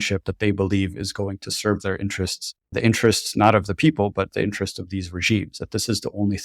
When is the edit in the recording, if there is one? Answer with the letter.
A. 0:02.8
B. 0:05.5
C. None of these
A